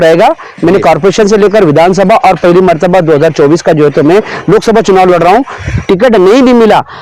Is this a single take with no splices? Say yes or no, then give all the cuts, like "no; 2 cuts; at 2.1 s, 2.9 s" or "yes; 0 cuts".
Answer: no; 1 cut; at 5.6 s